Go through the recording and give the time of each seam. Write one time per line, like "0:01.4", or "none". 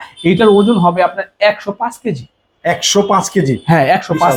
none